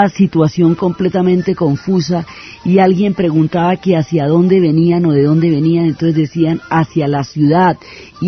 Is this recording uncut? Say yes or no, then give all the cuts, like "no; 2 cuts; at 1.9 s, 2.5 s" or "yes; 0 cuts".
no; 1 cut; at 6.9 s